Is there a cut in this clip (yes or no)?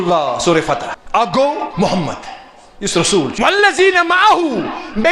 yes